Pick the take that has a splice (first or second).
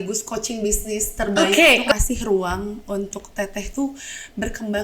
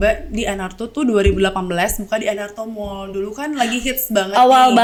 first